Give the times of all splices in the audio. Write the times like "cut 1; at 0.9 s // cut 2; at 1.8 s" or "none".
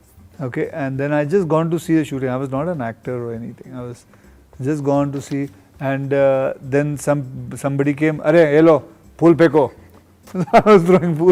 none